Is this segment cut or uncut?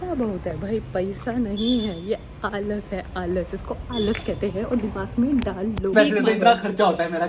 cut